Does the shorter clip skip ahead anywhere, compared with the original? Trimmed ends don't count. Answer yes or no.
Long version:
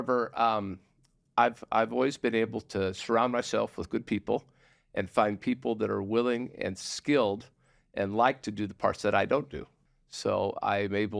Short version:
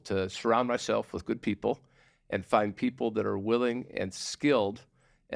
no